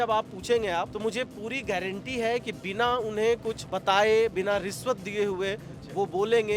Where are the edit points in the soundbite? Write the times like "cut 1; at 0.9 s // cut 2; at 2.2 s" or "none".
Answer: cut 1; at 0.9 s // cut 2; at 3.7 s

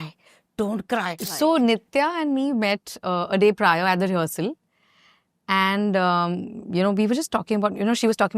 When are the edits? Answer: cut 1; at 1.2 s

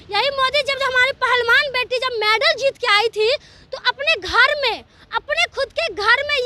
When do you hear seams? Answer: none

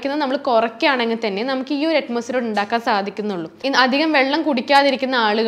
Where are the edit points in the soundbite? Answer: cut 1; at 3.5 s

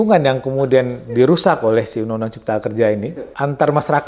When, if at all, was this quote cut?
cut 1; at 3.1 s

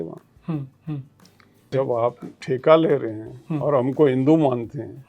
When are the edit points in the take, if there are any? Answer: cut 1; at 1.7 s

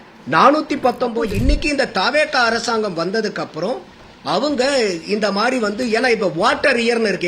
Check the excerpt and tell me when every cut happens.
cut 1; at 1.2 s

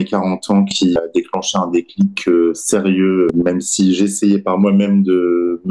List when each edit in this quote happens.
cut 1; at 1.0 s // cut 2; at 3.3 s

